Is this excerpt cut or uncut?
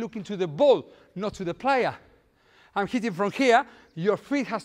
uncut